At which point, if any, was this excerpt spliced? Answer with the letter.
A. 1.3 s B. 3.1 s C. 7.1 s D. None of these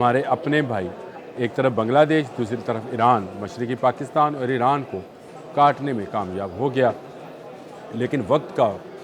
D